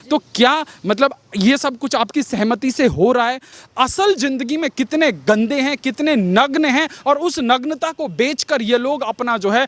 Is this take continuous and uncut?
no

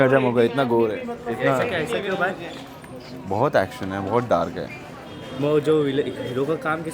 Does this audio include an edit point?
no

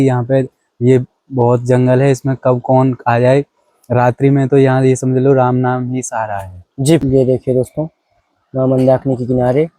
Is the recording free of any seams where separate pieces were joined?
no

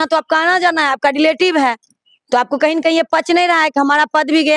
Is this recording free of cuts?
yes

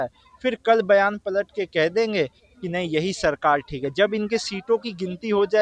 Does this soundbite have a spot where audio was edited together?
no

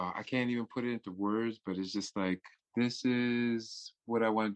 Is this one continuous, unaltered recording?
no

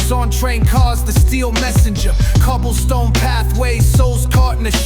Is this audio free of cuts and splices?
yes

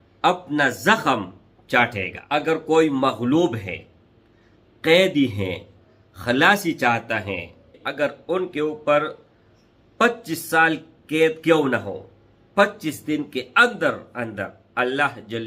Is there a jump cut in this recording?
yes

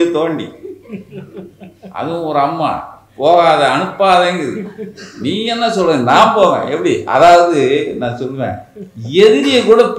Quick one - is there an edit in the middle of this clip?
no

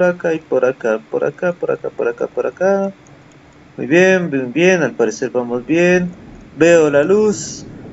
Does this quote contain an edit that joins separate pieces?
no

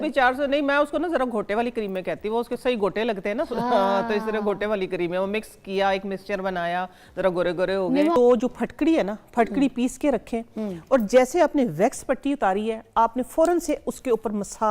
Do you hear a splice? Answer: yes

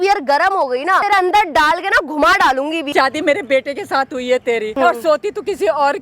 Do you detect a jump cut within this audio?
yes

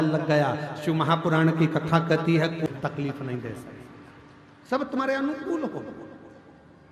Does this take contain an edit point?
yes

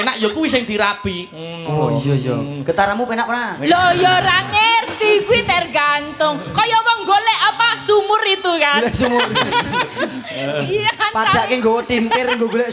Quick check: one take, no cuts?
yes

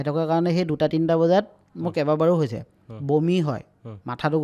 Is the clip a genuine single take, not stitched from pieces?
yes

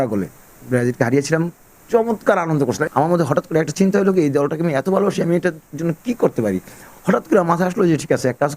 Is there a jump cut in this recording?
yes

